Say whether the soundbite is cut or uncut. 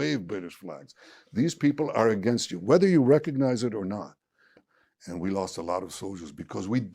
cut